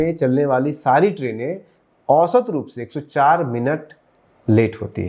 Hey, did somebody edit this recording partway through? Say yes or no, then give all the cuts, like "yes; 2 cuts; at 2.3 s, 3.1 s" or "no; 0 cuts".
no; 0 cuts